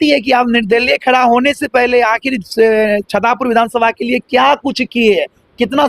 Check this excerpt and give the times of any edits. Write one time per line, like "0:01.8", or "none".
none